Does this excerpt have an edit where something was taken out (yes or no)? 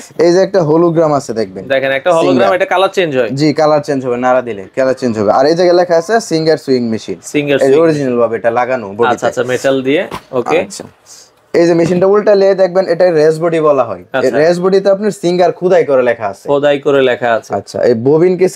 no